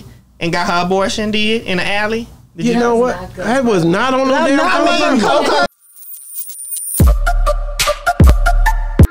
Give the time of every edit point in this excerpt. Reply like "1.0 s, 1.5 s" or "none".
5.7 s